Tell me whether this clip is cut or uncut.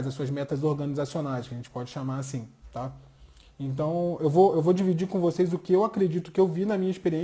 uncut